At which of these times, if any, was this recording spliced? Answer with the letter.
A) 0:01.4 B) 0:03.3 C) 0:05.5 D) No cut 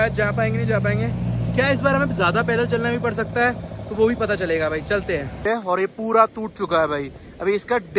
C